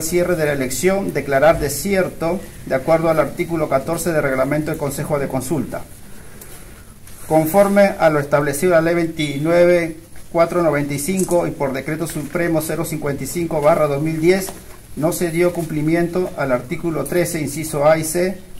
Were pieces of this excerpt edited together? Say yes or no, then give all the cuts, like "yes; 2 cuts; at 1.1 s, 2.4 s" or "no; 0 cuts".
no; 0 cuts